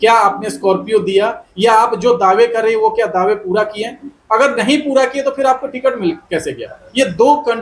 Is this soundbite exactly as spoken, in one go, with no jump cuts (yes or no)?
yes